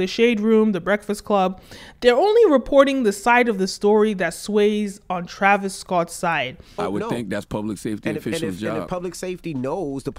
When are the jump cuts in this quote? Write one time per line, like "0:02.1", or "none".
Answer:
0:06.6

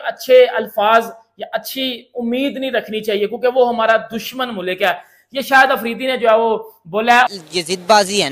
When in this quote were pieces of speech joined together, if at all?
none

